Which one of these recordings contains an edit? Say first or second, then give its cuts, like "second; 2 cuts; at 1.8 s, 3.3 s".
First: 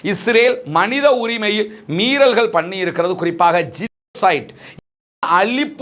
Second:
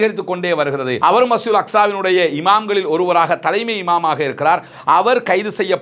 second; 1 cut; at 0.9 s